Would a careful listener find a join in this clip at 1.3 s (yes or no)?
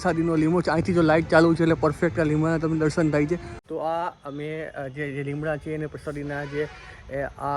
no